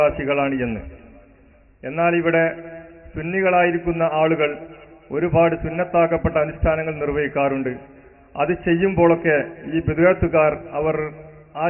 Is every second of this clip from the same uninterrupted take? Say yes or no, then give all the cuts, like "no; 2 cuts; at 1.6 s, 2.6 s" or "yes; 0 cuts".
yes; 0 cuts